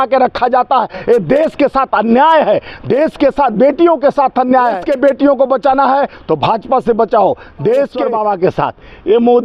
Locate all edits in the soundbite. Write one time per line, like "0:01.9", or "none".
0:04.9
0:08.0